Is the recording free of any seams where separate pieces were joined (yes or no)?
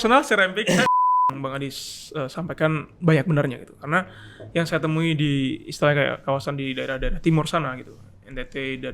no